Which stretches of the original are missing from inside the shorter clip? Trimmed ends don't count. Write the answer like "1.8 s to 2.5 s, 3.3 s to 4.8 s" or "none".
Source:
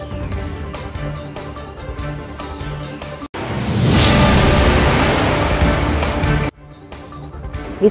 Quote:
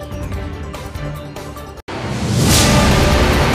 1.8 s to 3.3 s